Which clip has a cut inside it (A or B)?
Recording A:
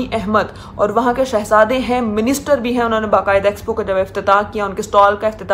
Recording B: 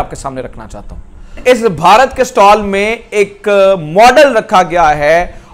B